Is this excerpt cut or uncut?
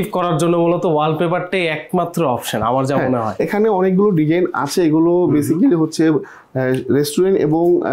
uncut